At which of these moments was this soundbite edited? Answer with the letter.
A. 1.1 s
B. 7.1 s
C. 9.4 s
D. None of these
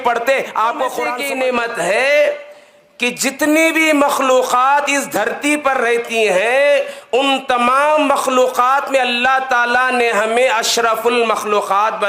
A